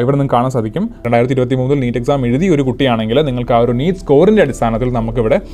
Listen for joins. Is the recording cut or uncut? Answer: cut